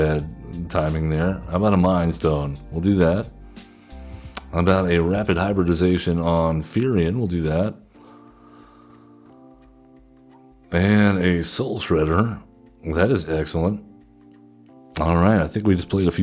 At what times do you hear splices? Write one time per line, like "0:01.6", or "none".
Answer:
none